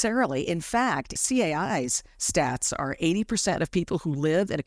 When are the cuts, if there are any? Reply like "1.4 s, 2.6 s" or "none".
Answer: 1.1 s